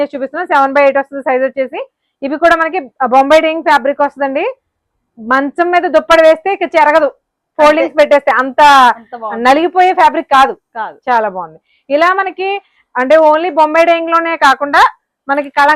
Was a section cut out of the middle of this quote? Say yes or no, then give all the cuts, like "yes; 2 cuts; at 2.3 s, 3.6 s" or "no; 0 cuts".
no; 0 cuts